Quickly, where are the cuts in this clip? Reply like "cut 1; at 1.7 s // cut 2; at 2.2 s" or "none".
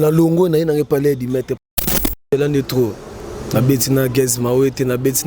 cut 1; at 1.8 s